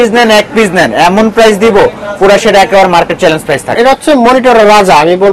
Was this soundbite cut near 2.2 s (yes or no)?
no